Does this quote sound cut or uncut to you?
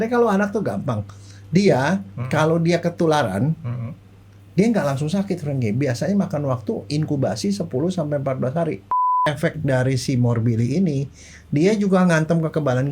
cut